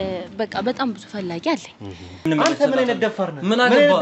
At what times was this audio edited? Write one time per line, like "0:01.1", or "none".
0:02.2